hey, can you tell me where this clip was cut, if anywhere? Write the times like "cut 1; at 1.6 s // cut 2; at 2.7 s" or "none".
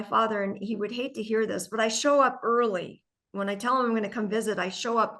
none